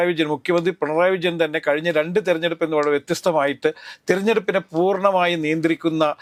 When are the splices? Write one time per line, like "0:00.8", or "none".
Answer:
none